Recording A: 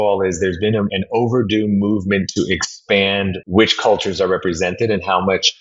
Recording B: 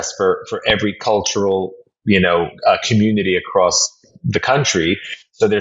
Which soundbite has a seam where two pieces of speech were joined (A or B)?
A